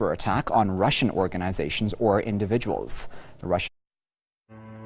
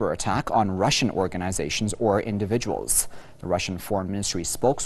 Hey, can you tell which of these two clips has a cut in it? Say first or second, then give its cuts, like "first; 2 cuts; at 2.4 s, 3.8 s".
second; 1 cut; at 3.8 s